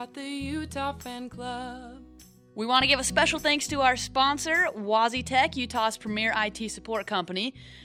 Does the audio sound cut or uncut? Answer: cut